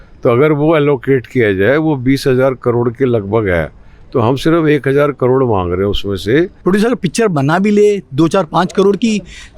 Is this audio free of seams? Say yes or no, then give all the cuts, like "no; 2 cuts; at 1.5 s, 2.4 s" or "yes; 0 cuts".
no; 1 cut; at 6.6 s